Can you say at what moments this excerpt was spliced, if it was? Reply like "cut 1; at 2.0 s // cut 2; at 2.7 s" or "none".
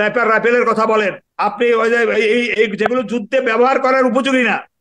cut 1; at 1.2 s